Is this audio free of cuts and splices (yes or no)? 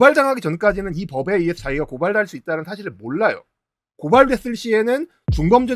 yes